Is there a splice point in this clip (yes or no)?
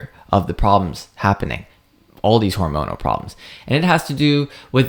no